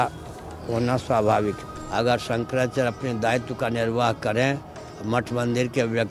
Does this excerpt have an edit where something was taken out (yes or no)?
yes